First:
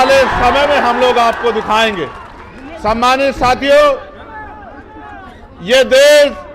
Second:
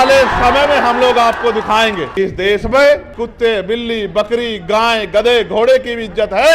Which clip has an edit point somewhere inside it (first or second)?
second